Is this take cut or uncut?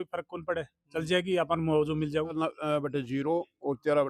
cut